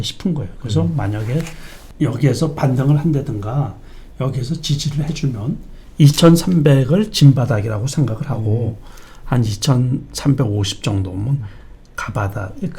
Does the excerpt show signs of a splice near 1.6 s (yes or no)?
no